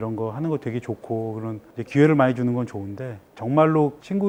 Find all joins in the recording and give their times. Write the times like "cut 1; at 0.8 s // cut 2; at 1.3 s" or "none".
none